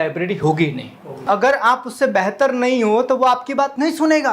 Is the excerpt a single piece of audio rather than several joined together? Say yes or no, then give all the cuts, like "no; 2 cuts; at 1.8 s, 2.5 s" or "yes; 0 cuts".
no; 1 cut; at 1.3 s